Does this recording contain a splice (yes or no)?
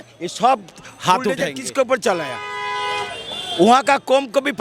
yes